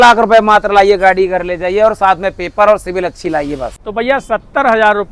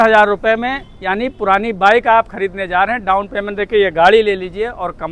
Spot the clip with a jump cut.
first; 1 cut; at 3.7 s

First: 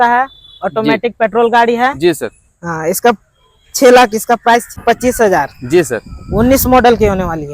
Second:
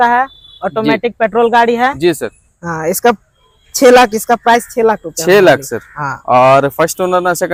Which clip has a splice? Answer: first; 1 cut; at 4.7 s

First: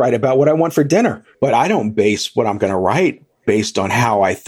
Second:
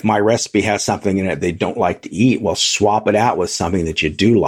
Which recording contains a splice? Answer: first; 1 cut; at 1.3 s

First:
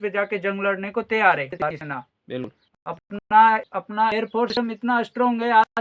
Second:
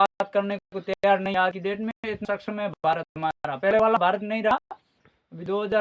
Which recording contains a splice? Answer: first; 1 cut; at 1.5 s

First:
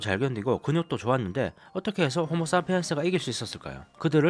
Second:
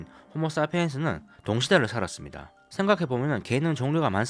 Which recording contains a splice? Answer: second; 1 cut; at 1.3 s

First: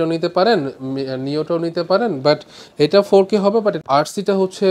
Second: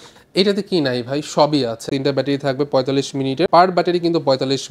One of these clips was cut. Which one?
second; 2 cuts; at 1.9 s, 3.5 s

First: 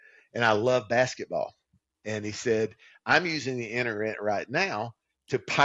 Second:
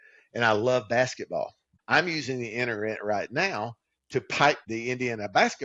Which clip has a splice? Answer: second; 2 cuts; at 1.7 s, 4.6 s

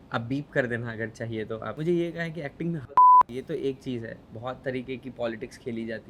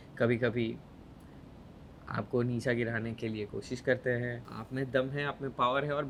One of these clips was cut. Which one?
first; 1 cut; at 3.3 s

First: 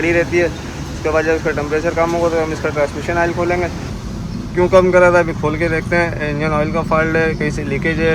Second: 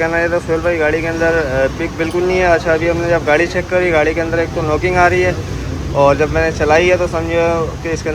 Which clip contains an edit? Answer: first; 1 cut; at 3.9 s

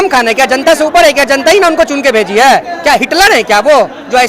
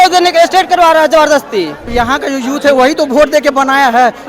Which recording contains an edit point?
second; 1 cut; at 1.8 s

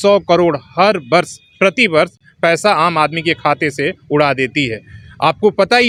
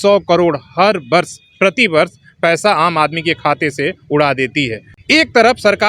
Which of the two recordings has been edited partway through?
second; 1 cut; at 4.9 s

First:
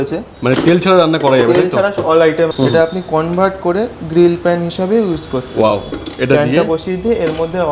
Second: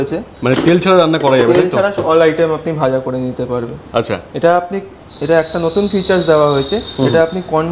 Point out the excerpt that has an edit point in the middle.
first; 2 cuts; at 2.5 s, 5.9 s

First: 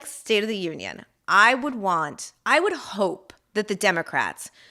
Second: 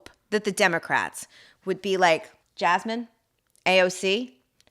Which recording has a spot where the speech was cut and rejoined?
second; 1 cut; at 2.4 s

